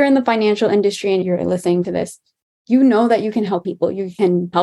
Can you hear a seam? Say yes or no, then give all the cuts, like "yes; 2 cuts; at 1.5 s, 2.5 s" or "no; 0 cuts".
yes; 1 cut; at 1.2 s